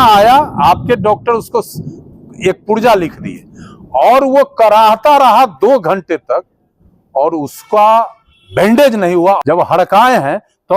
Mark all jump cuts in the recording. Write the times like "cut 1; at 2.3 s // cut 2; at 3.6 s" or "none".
cut 1; at 9.4 s